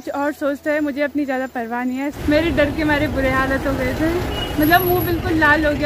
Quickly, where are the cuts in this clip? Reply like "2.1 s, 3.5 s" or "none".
2.1 s